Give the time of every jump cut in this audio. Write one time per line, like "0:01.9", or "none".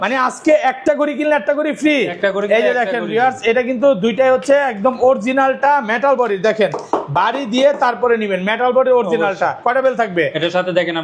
none